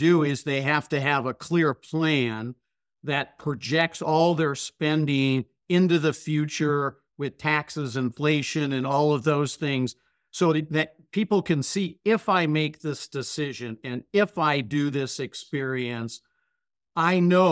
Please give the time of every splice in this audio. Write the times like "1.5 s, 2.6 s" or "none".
none

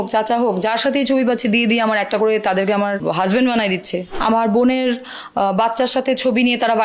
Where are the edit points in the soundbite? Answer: 3.0 s, 4.1 s

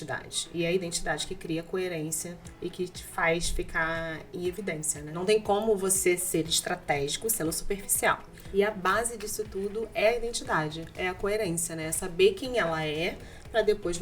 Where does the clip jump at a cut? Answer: 5.2 s, 8.4 s

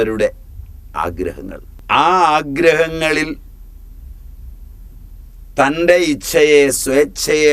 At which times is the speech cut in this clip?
1.7 s

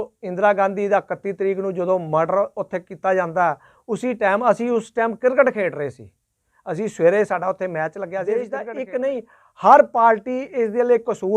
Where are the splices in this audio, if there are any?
8.2 s

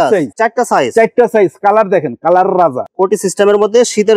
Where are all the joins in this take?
2.8 s

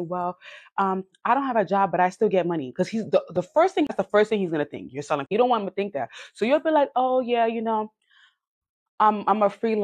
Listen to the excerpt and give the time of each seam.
3.9 s, 5.3 s

